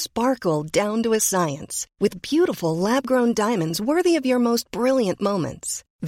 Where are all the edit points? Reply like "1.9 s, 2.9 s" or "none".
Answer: none